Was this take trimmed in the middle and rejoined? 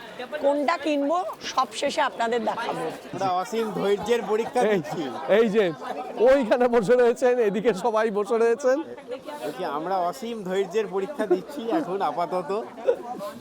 yes; 1 cut; at 3.0 s

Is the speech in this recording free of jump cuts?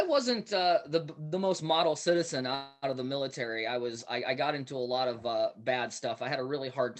yes; 0 cuts

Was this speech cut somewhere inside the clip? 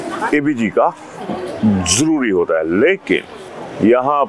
no; 0 cuts

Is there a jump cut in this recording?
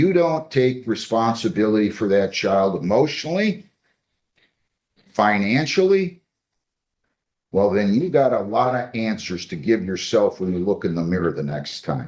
no; 0 cuts

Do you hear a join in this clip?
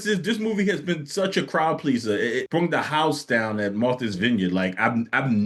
no; 0 cuts

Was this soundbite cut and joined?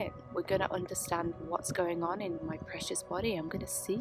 yes; 1 cut; at 2.4 s

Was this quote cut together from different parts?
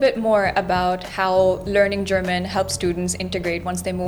no; 0 cuts

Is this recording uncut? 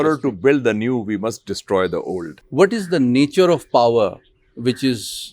no; 1 cut; at 2.4 s

